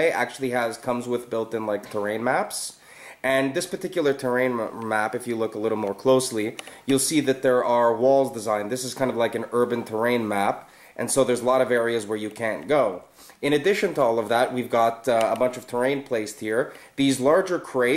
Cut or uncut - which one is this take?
cut